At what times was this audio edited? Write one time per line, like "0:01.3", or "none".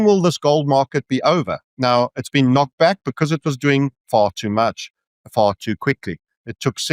0:01.6